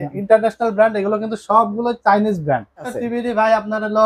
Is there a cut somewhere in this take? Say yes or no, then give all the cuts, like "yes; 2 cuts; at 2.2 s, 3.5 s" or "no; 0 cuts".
yes; 1 cut; at 2.9 s